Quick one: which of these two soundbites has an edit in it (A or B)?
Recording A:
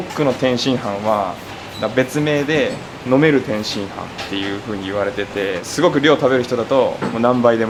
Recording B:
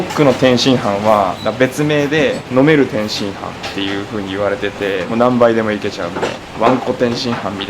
B